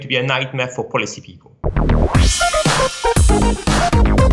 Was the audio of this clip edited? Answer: yes; 1 cut; at 1.5 s

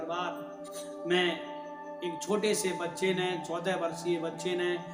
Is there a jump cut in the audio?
no; 0 cuts

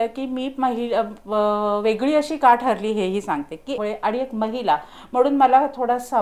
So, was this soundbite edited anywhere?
yes; 1 cut; at 3.8 s

